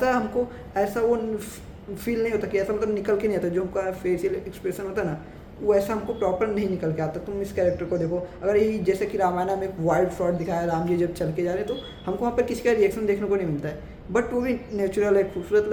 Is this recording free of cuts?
yes; 0 cuts

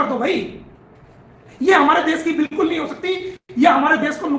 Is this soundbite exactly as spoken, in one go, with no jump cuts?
yes; 0 cuts

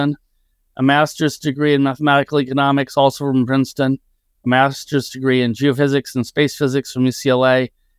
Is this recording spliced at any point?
no; 0 cuts

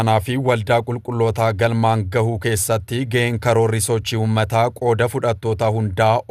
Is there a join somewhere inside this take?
no; 0 cuts

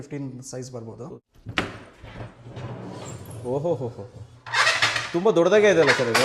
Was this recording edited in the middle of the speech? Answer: yes; 1 cut; at 1.0 s

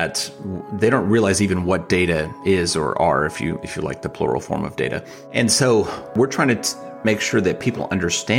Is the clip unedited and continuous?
no; 2 cuts; at 5.2 s, 6.1 s

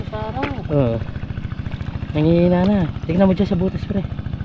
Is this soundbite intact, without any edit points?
yes; 0 cuts

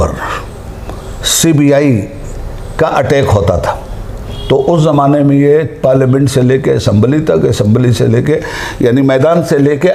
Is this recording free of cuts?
yes; 0 cuts

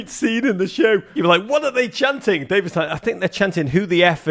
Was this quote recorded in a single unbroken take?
no; 1 cut; at 1.2 s

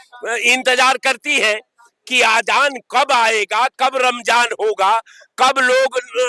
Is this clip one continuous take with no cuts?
yes; 0 cuts

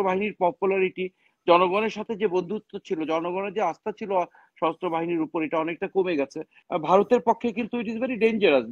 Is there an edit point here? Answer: yes; 1 cut; at 6.6 s

